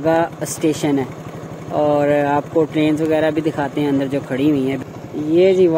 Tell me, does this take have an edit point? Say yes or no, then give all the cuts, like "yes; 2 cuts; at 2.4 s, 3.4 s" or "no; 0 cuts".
yes; 1 cut; at 4.8 s